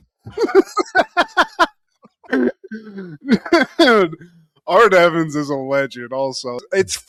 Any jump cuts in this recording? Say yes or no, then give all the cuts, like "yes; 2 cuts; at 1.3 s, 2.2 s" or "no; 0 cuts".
no; 0 cuts